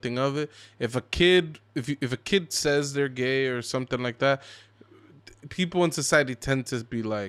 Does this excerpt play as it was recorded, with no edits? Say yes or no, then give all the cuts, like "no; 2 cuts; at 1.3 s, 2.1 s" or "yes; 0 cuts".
yes; 0 cuts